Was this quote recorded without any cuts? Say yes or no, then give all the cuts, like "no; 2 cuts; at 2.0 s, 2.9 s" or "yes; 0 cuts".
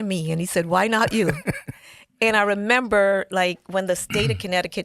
yes; 0 cuts